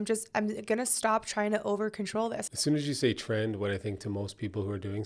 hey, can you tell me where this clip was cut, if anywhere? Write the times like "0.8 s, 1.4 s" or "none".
2.4 s